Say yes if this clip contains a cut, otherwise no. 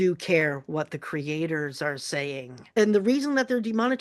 no